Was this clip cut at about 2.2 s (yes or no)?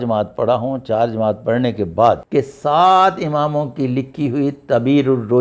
yes